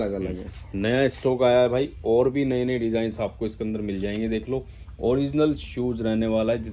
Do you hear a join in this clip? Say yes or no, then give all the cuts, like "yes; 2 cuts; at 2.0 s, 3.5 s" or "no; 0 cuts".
no; 0 cuts